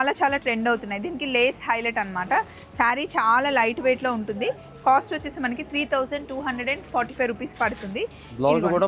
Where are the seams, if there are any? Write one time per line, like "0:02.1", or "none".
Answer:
none